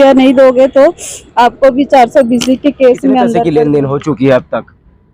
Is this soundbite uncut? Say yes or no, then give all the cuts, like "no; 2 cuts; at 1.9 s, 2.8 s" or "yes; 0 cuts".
no; 1 cut; at 3.4 s